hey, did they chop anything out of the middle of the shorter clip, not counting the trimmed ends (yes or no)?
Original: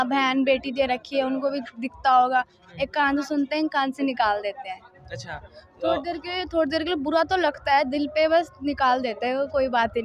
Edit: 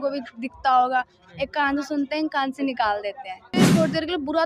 yes